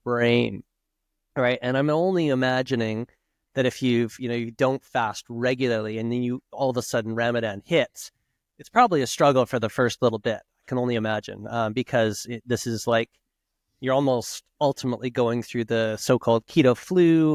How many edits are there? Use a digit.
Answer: 0